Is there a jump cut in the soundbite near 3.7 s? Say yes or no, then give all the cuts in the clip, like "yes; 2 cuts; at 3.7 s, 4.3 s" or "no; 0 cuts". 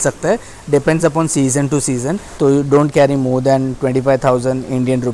no; 1 cut; at 2.2 s